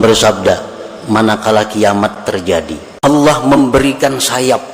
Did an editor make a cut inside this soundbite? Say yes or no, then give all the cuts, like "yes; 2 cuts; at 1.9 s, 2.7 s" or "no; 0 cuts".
yes; 1 cut; at 2.8 s